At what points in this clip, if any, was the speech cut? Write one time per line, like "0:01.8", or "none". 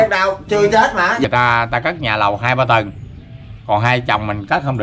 0:01.2